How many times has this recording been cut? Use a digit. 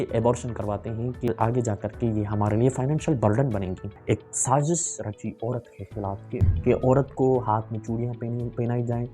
3